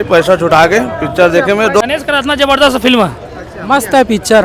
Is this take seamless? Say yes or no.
yes